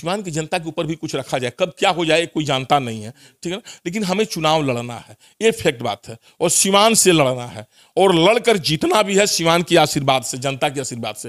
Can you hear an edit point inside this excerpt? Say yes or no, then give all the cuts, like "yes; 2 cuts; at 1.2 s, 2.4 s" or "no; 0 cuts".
no; 0 cuts